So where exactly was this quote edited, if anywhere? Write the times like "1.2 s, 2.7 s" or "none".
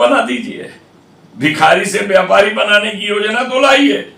none